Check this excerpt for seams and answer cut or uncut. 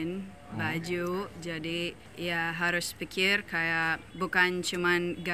cut